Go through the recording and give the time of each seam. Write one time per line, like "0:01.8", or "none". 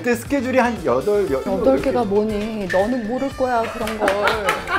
0:01.4